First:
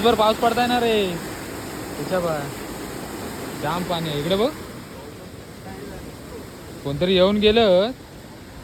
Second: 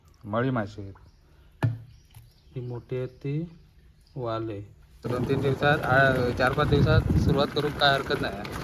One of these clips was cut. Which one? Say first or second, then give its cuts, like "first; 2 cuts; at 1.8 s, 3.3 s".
second; 1 cut; at 5.1 s